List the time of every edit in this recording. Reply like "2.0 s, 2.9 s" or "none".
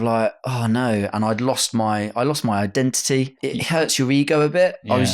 3.3 s

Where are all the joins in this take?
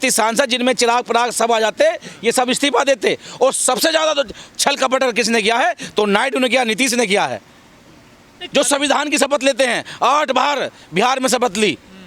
none

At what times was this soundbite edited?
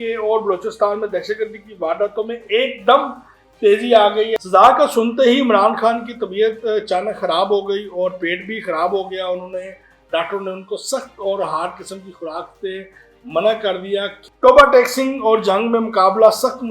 4.3 s, 14.2 s

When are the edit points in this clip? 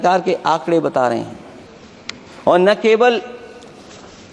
none

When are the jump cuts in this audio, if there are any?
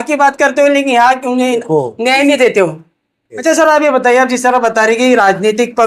3.4 s

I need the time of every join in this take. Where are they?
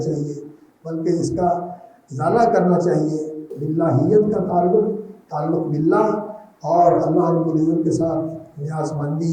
3.5 s

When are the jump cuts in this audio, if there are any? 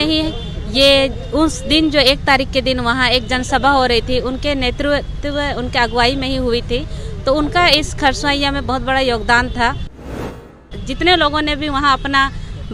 10.4 s

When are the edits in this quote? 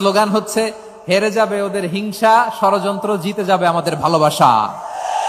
none

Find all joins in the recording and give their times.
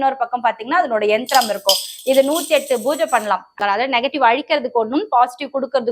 3.5 s

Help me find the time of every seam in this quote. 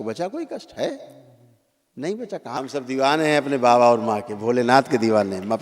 2.6 s

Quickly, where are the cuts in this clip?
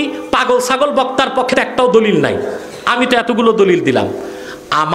1.5 s

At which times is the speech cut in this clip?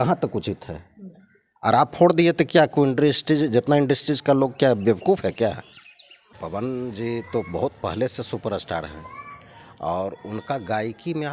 6.2 s

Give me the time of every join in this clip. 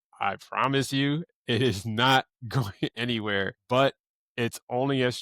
3.6 s

